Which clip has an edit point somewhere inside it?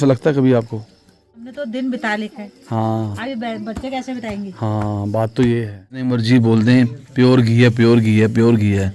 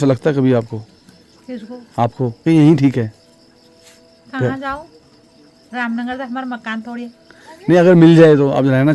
first; 2 cuts; at 1.5 s, 6.0 s

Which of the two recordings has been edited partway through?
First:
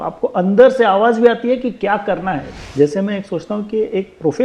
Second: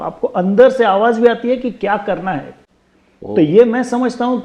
first; 1 cut; at 2.6 s

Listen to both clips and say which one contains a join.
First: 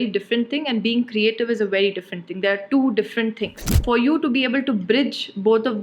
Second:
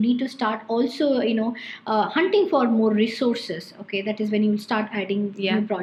first; 1 cut; at 3.8 s

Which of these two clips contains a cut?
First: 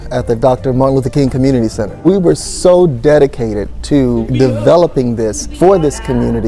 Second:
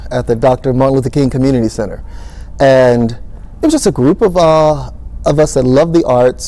first; 3 cuts; at 1.9 s, 4.3 s, 5.4 s

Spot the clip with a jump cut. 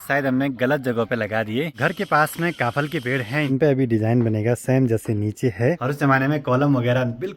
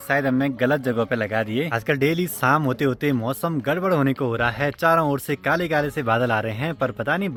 first; 3 cuts; at 1.7 s, 3.5 s, 5.8 s

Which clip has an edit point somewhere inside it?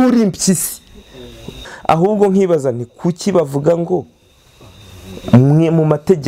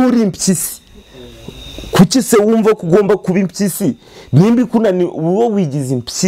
first; 1 cut; at 1.7 s

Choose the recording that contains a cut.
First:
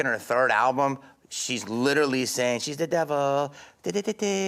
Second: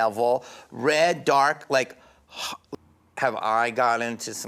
second; 1 cut; at 2.6 s

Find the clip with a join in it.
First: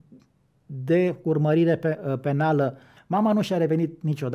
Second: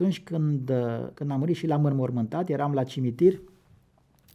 first; 1 cut; at 2.9 s

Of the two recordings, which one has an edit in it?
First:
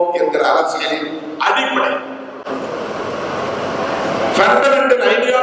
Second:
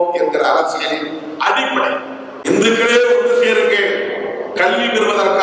second; 1 cut; at 2.4 s

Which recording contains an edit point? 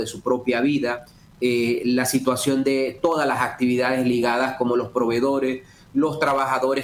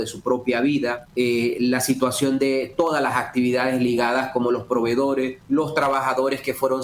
second; 2 cuts; at 1.0 s, 5.4 s

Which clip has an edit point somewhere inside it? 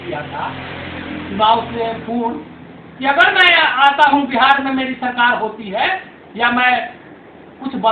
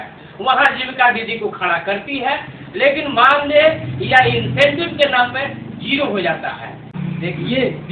second; 1 cut; at 7.0 s

